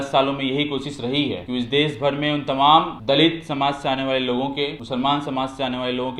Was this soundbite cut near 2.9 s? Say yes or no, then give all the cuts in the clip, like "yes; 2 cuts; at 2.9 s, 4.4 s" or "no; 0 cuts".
yes; 3 cuts; at 1.4 s, 2.9 s, 4.8 s